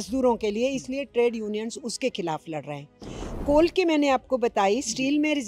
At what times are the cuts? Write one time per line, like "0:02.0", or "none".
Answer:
0:03.4